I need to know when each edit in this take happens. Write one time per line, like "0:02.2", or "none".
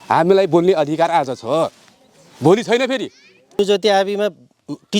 0:03.6